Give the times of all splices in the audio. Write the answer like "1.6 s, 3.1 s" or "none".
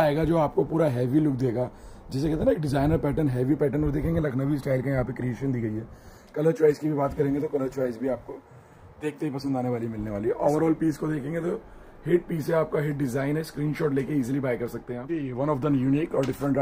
none